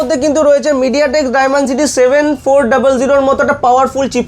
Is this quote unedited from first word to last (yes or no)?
yes